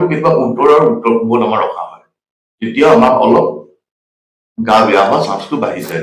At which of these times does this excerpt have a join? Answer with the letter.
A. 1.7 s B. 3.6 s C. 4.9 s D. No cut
D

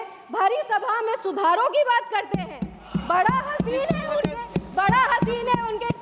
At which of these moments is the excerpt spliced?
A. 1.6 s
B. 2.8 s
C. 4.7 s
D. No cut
D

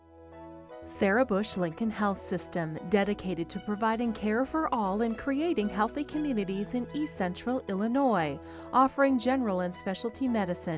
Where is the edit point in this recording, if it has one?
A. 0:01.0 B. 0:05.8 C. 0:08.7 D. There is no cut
A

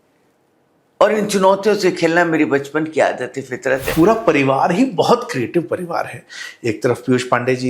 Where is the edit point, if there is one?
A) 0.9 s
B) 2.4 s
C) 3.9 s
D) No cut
C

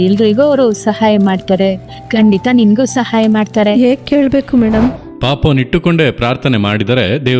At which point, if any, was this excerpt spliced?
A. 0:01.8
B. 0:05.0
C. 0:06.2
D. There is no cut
B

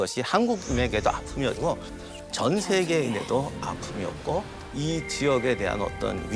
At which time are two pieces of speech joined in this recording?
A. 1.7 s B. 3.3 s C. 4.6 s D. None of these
C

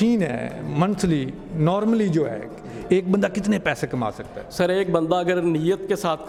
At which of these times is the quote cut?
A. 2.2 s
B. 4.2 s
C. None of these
C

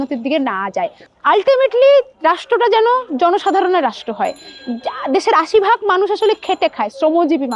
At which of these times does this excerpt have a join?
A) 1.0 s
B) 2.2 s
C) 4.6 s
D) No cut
A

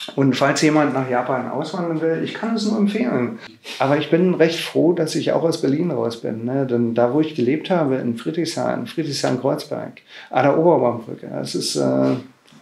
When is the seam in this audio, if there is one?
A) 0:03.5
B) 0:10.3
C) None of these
A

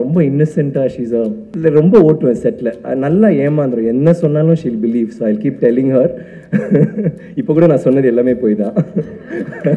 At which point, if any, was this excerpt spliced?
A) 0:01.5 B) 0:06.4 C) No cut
A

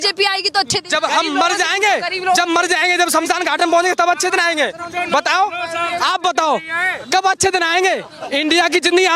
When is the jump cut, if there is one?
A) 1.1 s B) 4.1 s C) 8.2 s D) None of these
C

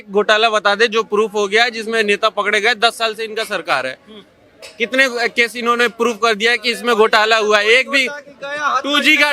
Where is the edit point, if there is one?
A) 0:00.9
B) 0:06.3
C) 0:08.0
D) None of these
D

